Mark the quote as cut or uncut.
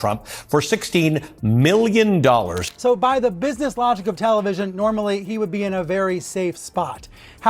cut